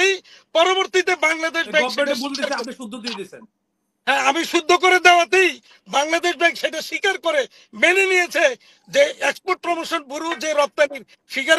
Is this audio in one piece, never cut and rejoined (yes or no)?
yes